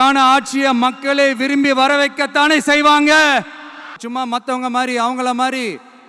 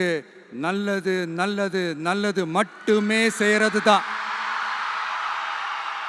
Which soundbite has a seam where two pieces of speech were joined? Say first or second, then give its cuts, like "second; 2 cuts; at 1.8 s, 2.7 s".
first; 1 cut; at 4.0 s